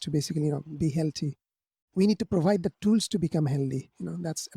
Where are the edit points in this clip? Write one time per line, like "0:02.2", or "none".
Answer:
0:01.8